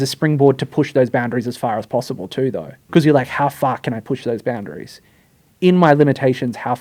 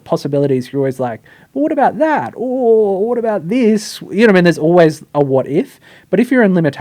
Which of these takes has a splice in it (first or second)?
first